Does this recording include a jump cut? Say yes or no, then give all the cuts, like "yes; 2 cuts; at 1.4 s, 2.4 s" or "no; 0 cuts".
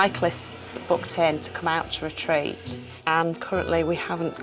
yes; 1 cut; at 3.3 s